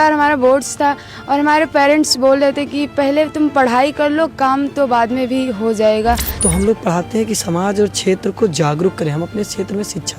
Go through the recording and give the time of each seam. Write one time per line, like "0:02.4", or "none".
0:06.4